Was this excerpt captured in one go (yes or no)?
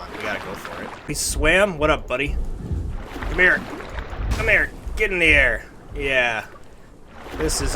no